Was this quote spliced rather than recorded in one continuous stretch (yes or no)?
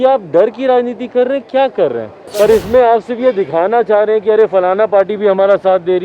yes